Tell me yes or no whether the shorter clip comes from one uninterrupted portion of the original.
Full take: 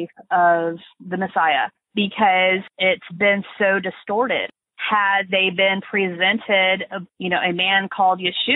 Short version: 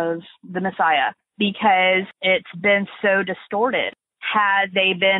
yes